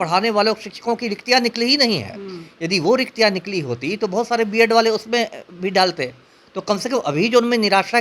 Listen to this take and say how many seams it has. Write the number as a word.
zero